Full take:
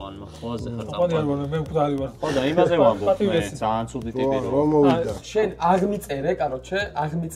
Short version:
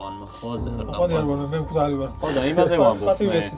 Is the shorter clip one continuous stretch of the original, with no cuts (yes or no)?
yes